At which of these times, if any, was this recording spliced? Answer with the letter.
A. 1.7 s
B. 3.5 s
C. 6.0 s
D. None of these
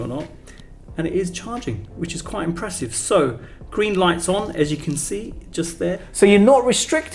C